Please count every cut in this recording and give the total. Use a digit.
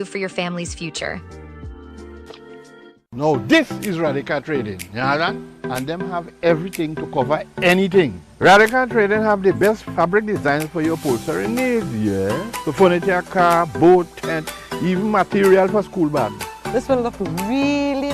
1